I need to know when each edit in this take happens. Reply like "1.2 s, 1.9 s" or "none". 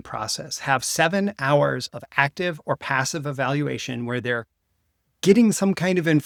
none